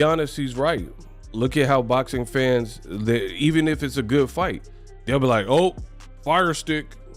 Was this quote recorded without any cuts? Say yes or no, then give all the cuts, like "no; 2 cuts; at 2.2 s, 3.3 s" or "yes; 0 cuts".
yes; 0 cuts